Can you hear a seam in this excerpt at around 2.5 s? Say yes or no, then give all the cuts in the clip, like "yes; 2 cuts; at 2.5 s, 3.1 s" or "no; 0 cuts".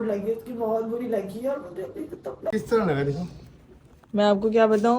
yes; 1 cut; at 2.5 s